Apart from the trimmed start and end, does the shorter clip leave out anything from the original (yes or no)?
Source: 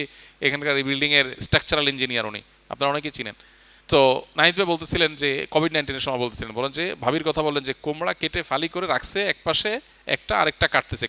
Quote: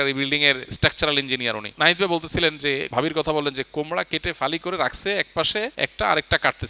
yes